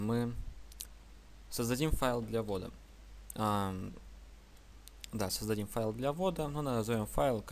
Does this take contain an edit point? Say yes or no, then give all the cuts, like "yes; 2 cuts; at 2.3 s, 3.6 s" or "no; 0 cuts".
yes; 1 cut; at 5.7 s